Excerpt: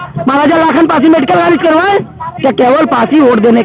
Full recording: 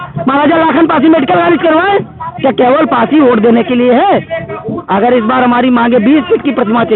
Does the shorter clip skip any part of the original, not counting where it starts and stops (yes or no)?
no